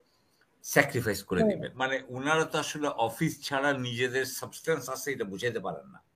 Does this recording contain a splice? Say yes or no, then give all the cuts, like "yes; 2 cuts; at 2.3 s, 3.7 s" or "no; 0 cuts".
yes; 1 cut; at 1.7 s